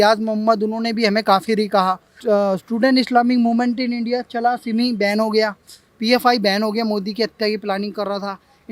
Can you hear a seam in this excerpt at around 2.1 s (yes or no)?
yes